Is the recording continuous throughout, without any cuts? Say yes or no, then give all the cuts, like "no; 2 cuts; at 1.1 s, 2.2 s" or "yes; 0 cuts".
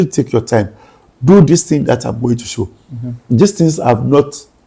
yes; 0 cuts